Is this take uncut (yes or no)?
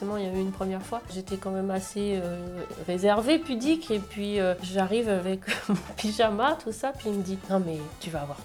yes